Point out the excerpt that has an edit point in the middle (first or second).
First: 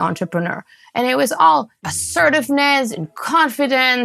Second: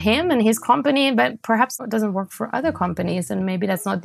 second